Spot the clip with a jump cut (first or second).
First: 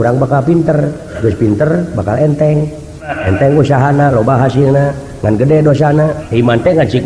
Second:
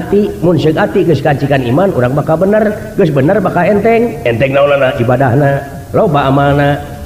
first